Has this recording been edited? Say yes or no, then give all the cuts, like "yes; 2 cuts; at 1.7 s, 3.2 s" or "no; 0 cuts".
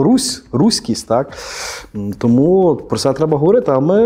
no; 0 cuts